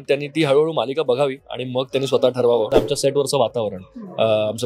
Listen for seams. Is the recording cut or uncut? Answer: cut